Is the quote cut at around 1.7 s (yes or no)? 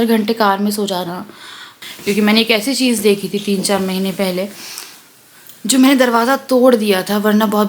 yes